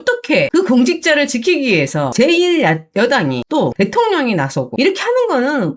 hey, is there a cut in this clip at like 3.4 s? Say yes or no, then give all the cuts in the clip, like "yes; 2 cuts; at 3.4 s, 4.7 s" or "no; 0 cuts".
no; 1 cut; at 2.1 s